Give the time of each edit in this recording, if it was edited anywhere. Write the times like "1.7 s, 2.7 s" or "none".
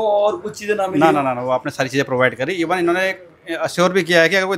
none